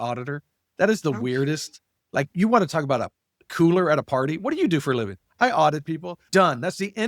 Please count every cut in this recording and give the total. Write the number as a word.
zero